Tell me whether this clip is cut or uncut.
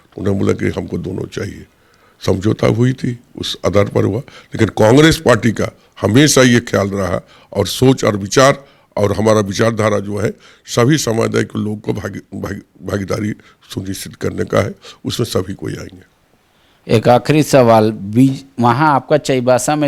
uncut